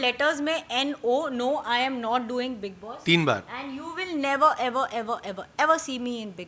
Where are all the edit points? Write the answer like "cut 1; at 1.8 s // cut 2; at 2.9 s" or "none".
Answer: none